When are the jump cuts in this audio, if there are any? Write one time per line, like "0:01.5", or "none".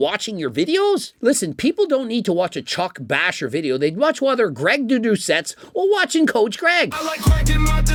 none